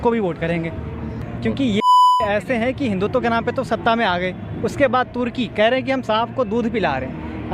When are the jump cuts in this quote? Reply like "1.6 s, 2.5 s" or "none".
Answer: none